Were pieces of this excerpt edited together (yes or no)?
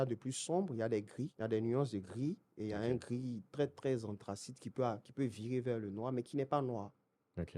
yes